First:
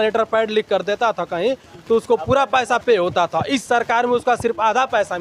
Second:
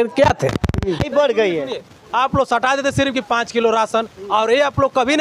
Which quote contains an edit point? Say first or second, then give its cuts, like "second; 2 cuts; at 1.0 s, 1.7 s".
second; 1 cut; at 1.1 s